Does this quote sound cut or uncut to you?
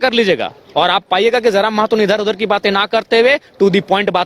uncut